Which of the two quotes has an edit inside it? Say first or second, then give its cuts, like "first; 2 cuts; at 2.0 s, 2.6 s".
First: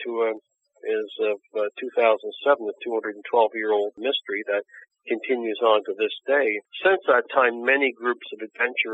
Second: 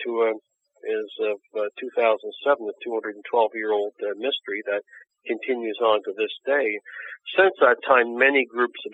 first; 2 cuts; at 4.0 s, 6.7 s